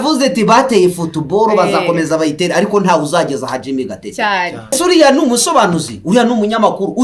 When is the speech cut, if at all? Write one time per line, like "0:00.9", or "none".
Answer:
0:04.7